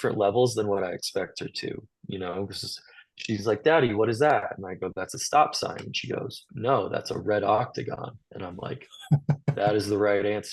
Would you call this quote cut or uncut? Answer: uncut